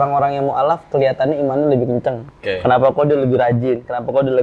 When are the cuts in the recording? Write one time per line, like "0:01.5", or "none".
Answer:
0:02.3